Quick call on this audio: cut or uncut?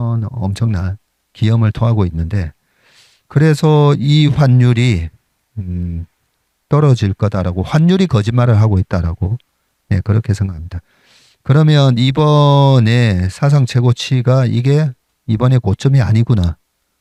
uncut